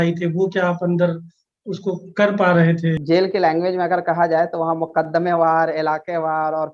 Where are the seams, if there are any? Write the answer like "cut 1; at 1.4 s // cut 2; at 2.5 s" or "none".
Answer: cut 1; at 3.0 s